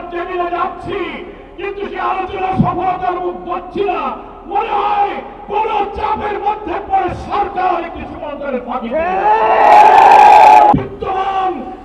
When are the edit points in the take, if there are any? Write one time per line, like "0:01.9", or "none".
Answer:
0:10.7